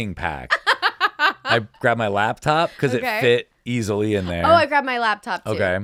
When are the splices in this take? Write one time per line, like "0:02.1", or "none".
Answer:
none